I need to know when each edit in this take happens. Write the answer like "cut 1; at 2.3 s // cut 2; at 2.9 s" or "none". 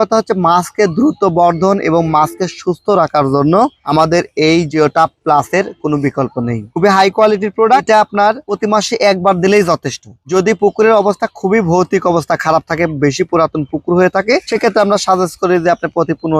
cut 1; at 7.8 s